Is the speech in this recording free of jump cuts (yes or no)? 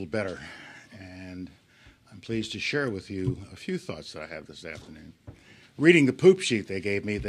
no